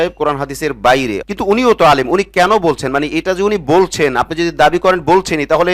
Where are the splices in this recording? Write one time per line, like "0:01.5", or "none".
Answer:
0:01.2